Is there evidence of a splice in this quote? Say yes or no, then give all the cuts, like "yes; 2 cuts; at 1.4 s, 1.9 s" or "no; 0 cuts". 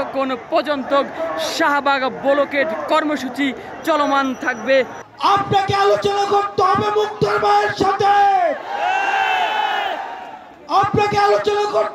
yes; 1 cut; at 5.0 s